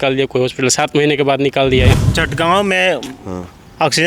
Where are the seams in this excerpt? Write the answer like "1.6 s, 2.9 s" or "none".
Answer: 2.0 s